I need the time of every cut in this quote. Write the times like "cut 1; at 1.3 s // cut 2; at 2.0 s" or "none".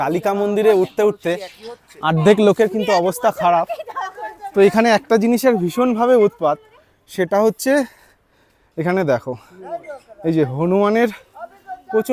none